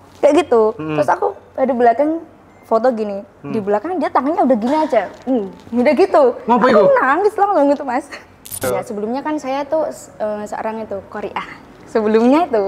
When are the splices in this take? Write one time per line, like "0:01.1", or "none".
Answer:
0:08.6